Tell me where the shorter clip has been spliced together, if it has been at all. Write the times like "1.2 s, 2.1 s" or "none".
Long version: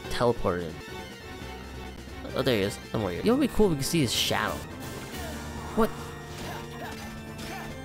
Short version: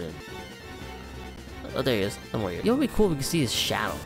none